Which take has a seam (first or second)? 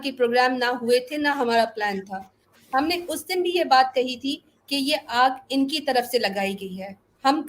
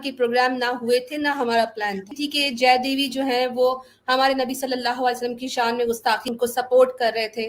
second